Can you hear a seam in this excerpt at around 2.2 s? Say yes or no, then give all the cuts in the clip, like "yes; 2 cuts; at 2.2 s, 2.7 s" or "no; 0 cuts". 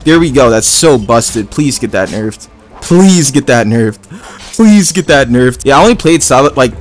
no; 1 cut; at 5.6 s